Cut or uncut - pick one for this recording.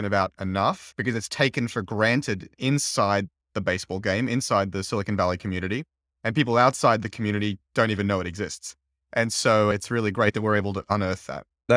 uncut